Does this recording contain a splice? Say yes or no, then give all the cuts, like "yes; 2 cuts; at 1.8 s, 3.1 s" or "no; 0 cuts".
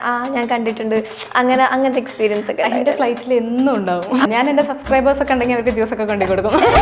yes; 1 cut; at 4.3 s